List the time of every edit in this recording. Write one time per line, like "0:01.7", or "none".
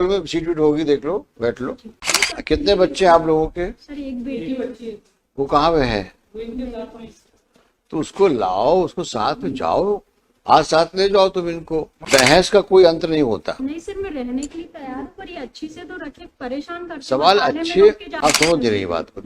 0:02.0
0:11.9
0:18.1